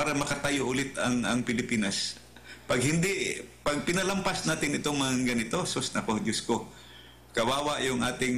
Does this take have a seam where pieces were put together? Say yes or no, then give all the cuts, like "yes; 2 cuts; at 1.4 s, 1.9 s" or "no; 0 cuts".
no; 0 cuts